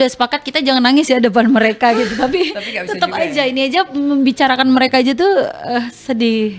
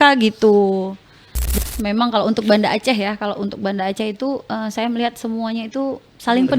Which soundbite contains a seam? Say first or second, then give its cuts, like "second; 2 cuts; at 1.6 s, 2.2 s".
second; 1 cut; at 1.4 s